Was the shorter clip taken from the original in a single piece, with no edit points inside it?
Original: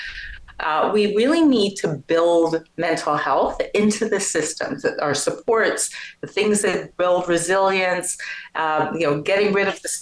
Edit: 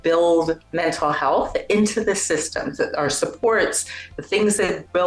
yes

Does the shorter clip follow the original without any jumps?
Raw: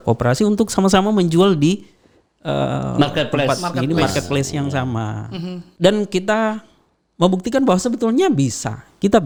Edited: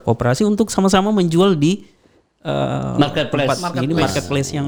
yes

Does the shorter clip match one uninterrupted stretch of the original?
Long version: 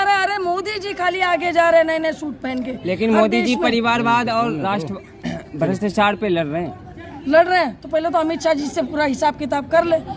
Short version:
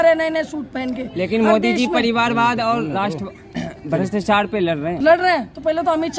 no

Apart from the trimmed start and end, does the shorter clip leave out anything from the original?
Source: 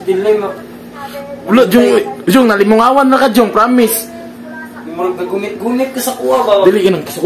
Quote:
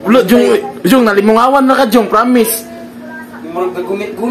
no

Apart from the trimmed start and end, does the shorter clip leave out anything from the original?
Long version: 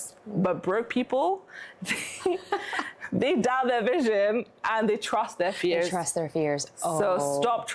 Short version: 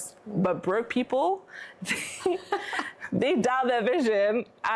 no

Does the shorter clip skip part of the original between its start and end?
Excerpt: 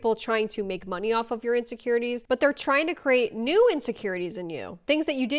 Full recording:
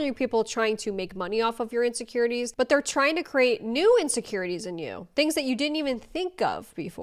no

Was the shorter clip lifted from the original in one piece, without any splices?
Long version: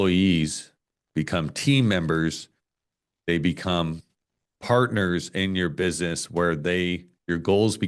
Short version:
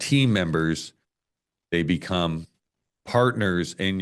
yes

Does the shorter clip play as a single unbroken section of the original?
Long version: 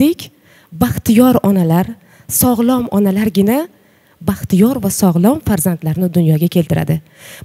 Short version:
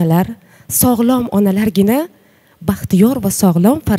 yes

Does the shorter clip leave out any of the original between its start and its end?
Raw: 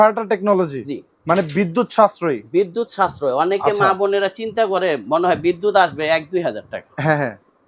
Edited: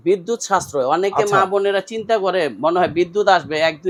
no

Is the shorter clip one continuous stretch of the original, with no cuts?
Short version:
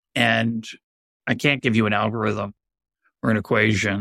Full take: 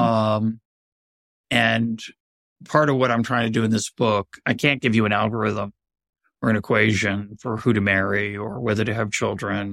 no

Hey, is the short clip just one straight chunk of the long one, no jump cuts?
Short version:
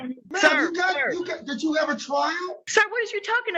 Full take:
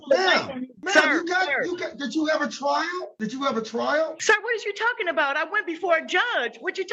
no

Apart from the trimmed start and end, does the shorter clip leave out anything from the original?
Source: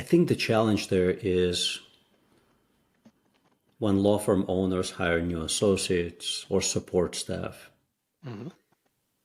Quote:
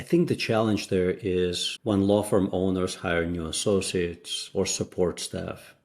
yes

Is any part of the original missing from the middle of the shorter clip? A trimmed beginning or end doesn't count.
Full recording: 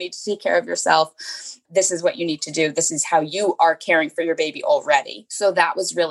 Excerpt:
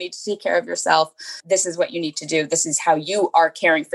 yes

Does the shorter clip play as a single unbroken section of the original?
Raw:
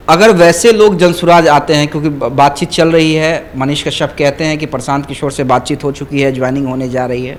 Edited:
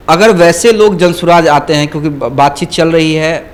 yes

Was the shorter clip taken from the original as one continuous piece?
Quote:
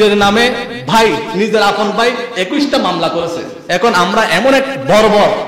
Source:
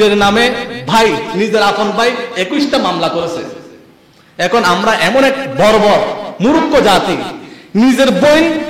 no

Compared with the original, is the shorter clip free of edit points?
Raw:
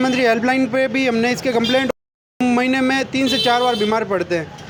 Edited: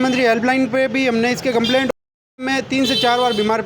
no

